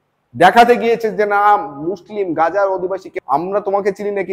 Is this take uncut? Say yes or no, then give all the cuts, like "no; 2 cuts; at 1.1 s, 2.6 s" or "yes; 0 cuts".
no; 1 cut; at 3.1 s